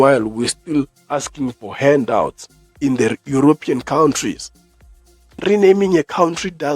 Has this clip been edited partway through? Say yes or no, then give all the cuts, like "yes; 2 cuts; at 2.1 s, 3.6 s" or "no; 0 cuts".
yes; 1 cut; at 5.4 s